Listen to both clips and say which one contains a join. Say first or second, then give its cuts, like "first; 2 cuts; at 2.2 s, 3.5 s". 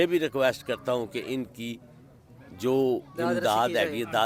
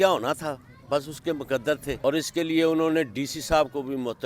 second; 1 cut; at 2.0 s